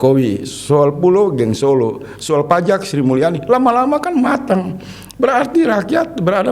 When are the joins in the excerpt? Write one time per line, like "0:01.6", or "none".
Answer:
none